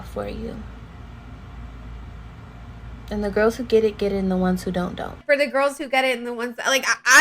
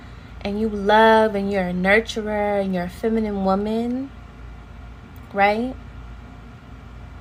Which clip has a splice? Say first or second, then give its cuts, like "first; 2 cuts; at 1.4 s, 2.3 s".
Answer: first; 1 cut; at 5.2 s